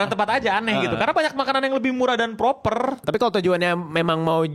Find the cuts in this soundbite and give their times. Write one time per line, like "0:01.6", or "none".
0:03.0

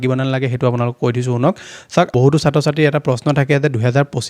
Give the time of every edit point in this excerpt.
0:02.1

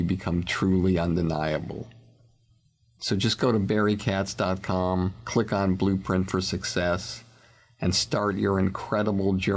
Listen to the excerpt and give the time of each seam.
none

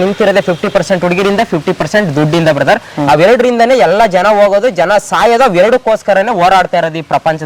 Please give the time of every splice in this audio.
none

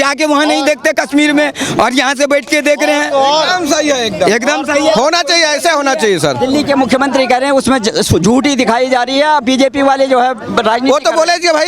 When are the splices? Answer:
none

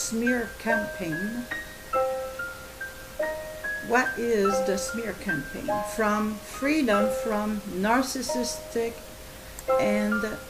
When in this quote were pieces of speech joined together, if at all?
0:06.1

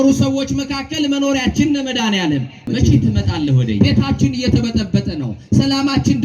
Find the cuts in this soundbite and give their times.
0:03.8

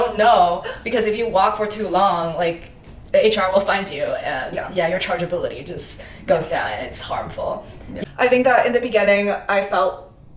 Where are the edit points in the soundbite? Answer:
0:07.9

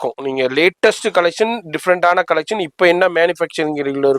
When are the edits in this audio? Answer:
none

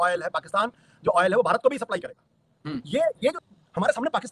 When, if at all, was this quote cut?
0:03.4

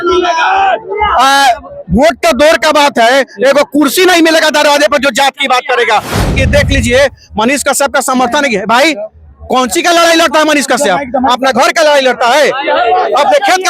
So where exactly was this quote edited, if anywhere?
0:06.3

